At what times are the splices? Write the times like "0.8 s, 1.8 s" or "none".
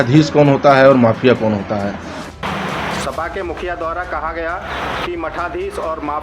2.2 s